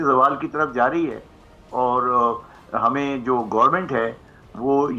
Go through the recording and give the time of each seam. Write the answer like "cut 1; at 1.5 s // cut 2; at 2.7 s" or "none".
none